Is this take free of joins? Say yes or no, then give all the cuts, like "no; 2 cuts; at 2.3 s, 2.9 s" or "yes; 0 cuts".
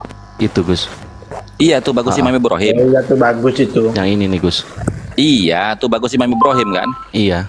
yes; 0 cuts